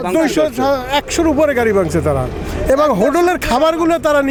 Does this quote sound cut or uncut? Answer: uncut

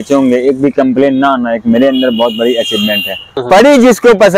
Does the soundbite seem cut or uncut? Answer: cut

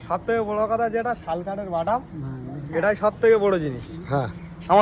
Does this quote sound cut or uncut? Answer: uncut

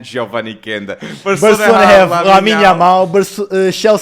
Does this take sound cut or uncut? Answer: cut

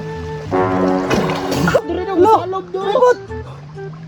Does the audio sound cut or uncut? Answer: cut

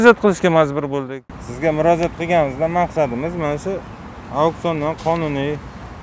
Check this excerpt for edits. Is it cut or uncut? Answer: uncut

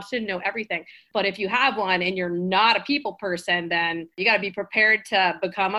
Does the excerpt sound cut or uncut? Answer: cut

